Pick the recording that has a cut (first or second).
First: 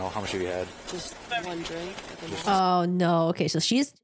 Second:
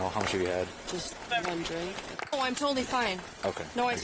second